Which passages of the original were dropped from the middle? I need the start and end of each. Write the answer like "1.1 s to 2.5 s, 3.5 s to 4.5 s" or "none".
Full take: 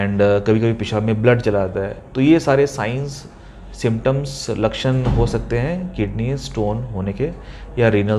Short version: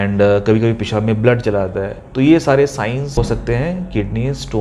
3.2 s to 5.2 s